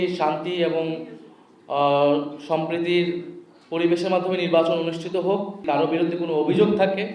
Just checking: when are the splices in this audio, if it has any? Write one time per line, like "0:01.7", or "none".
0:05.6